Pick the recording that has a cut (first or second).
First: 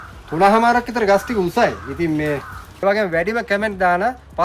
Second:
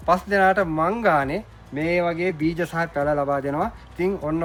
first